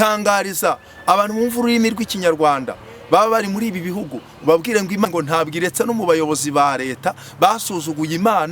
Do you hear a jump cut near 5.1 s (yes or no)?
yes